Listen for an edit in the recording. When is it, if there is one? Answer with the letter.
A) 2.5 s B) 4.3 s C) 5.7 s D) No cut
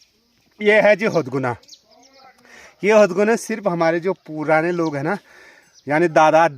D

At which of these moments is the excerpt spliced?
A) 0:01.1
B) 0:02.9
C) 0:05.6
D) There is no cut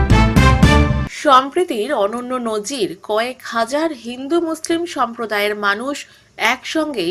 D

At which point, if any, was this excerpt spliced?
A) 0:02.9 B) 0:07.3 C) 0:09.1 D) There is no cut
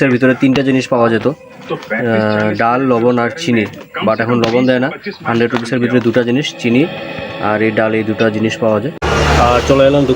C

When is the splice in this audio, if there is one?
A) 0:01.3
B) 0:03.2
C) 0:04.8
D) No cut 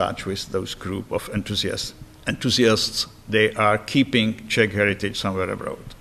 D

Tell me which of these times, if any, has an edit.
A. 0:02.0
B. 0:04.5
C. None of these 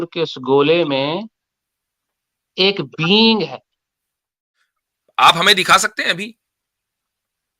B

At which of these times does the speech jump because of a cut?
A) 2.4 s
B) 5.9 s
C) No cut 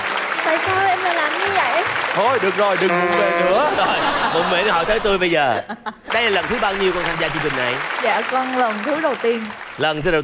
B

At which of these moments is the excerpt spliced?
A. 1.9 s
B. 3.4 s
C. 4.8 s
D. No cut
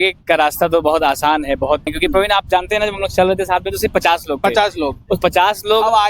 A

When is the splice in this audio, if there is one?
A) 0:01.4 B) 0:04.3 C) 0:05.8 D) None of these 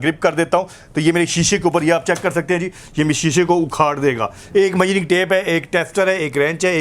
B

